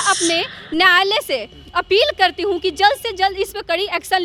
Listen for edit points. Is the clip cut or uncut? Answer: uncut